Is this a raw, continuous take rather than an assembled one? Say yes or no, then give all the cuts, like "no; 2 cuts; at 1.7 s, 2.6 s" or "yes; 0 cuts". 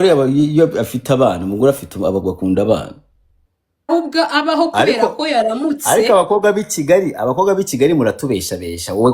no; 1 cut; at 3.9 s